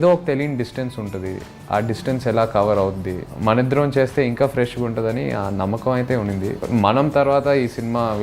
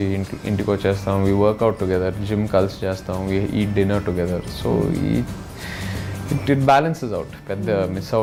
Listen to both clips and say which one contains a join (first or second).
first